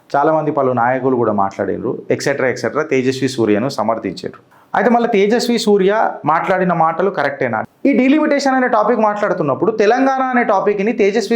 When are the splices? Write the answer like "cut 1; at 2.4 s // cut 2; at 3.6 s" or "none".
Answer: cut 1; at 7.6 s